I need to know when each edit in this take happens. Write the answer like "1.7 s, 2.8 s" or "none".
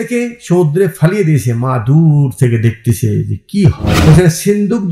3.9 s

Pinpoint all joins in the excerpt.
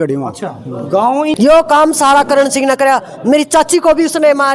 1.3 s

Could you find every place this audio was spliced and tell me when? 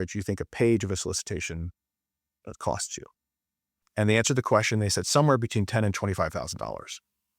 3.8 s

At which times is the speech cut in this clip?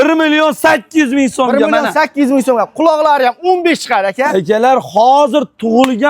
none

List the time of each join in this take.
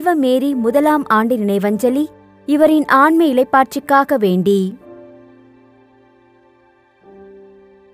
4.8 s

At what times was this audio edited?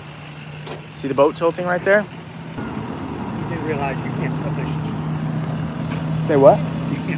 2.4 s

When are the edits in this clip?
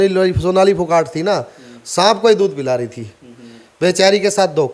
none

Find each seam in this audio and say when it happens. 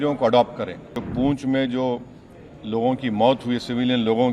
1.0 s

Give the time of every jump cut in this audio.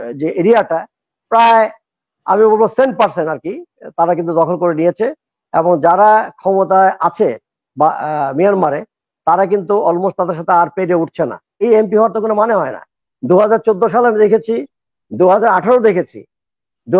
11.6 s

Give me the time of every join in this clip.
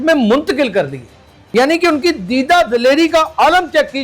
1.3 s

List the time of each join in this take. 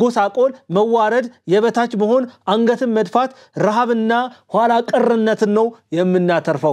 none

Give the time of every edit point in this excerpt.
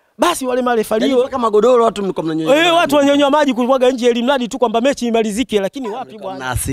none

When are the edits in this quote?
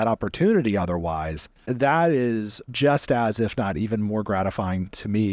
1.6 s, 2.6 s

